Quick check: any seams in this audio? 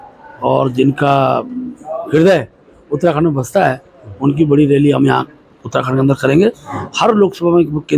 no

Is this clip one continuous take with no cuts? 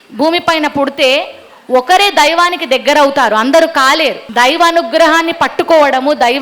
no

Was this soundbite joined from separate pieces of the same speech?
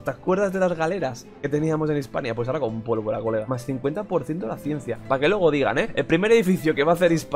yes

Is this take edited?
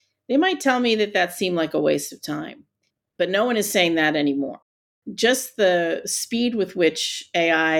yes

